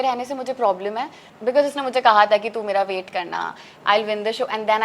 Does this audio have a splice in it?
yes; 1 cut; at 1.2 s

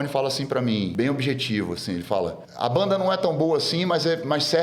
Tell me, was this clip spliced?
yes; 2 cuts; at 0.9 s, 2.4 s

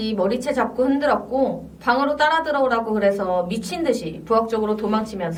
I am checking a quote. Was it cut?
no; 0 cuts

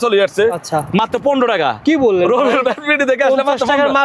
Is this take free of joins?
yes; 0 cuts

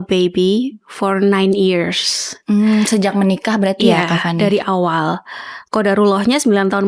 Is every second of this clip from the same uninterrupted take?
yes; 0 cuts

